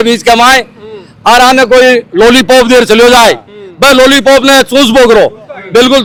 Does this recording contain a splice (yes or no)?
no